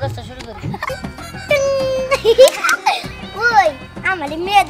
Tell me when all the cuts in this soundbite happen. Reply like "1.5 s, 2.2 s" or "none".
0.9 s